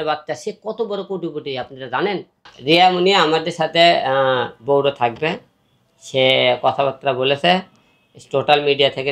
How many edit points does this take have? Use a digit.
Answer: 1